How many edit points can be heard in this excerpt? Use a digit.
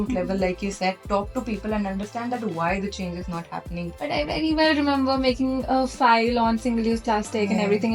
1